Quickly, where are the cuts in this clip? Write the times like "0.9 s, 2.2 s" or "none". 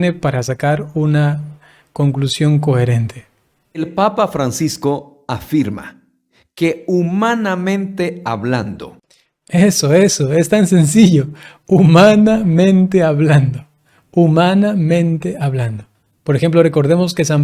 3.8 s